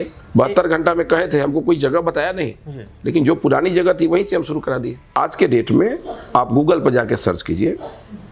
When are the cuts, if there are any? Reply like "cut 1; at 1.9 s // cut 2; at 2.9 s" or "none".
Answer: cut 1; at 5.2 s